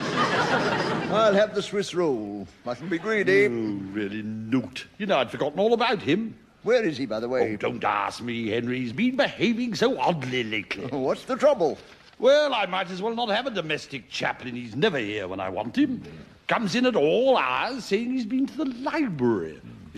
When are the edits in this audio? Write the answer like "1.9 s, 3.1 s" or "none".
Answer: 12.4 s